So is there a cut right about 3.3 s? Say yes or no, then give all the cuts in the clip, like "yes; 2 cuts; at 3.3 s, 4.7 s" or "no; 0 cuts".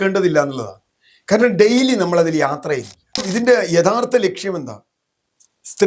yes; 1 cut; at 3.3 s